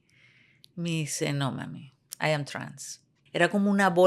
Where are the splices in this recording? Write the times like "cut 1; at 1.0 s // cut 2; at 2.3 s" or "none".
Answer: cut 1; at 3.1 s